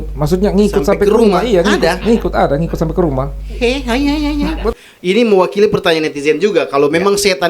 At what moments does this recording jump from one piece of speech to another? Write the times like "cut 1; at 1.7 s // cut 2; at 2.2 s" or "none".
cut 1; at 4.7 s